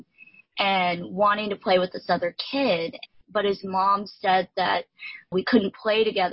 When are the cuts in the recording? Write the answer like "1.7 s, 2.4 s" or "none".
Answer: 3.1 s